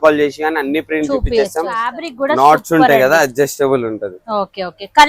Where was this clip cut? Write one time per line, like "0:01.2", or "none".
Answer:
0:02.0